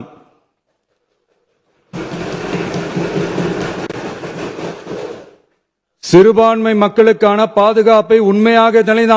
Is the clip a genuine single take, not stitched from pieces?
yes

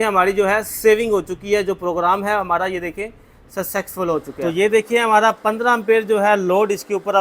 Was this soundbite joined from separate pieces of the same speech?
yes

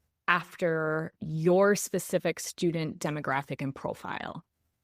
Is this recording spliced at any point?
yes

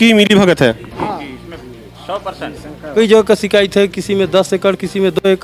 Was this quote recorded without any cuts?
no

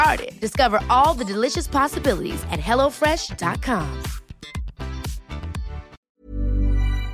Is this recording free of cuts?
no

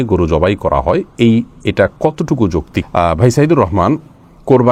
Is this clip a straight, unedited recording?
yes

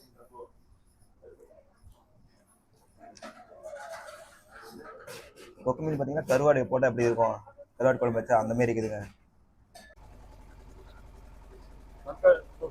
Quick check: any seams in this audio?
yes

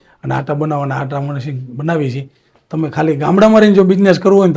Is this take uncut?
yes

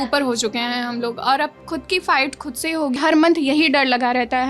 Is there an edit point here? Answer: yes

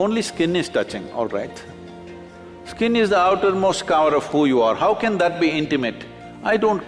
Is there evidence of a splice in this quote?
no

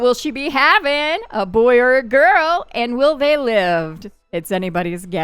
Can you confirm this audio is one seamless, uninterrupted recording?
yes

